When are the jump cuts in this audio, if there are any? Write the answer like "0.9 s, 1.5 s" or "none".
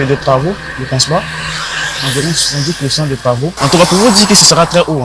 3.6 s